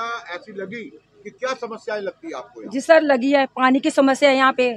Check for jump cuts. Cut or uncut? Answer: uncut